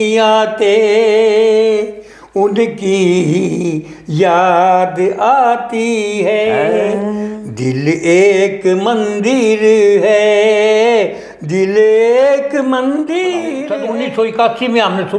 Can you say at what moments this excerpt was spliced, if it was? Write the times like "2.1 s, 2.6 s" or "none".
13.7 s